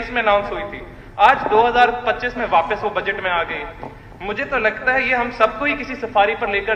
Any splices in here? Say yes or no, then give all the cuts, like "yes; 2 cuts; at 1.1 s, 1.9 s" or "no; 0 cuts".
no; 0 cuts